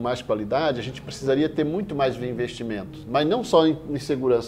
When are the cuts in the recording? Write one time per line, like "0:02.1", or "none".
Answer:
none